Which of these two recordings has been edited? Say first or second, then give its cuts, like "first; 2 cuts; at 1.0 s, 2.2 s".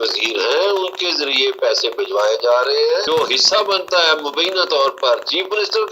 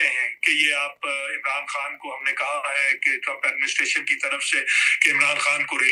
first; 1 cut; at 3.0 s